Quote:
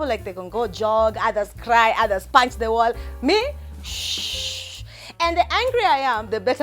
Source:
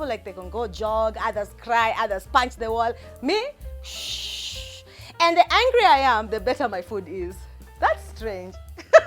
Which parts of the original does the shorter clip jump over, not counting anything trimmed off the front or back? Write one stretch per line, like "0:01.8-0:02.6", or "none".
none